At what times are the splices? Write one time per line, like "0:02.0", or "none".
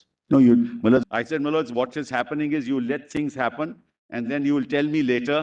0:01.0